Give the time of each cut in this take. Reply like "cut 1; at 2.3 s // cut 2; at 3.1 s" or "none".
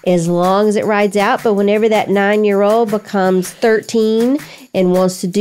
none